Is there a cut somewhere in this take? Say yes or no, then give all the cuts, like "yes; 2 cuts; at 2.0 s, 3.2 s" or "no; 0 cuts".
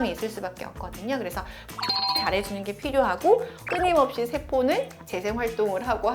yes; 1 cut; at 3.5 s